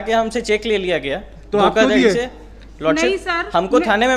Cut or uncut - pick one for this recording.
uncut